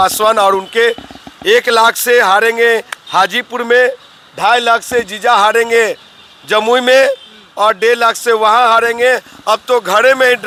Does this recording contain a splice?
no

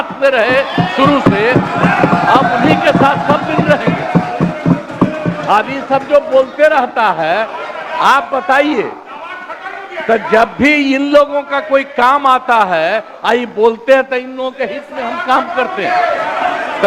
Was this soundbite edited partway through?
no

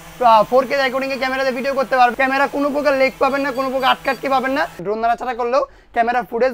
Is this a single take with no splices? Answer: no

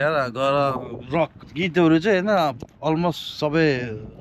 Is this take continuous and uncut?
no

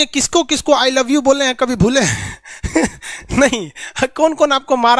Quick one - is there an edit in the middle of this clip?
no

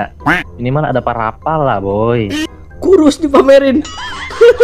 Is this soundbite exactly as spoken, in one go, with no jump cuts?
no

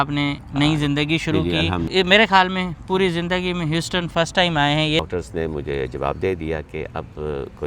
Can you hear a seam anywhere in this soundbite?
yes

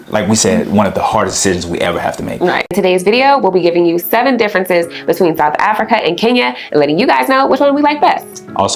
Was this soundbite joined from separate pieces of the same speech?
no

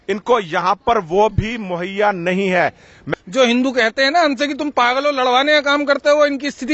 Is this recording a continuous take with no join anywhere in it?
no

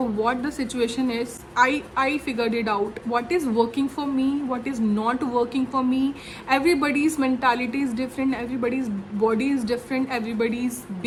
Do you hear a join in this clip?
no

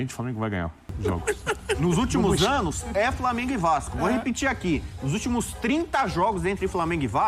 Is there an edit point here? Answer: yes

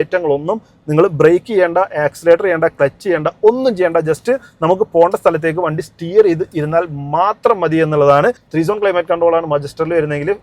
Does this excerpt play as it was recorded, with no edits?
no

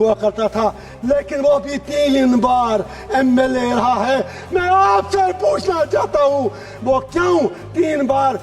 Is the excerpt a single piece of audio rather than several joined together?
yes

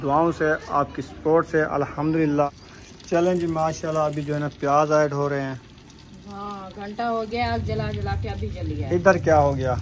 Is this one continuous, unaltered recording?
no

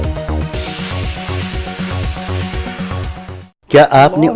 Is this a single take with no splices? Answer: no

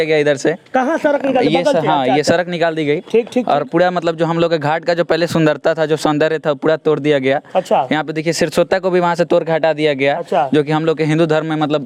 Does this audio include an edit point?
no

